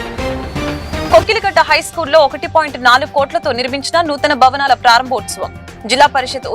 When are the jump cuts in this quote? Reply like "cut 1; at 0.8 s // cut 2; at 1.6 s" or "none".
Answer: cut 1; at 1.1 s